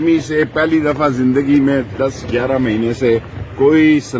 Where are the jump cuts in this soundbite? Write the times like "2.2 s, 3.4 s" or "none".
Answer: none